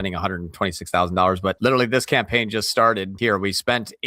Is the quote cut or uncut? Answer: cut